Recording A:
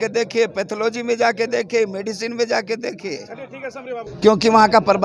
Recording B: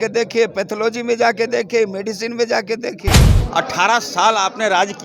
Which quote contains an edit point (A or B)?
B